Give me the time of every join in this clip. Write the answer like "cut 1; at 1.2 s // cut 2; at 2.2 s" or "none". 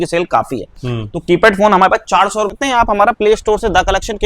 cut 1; at 2.5 s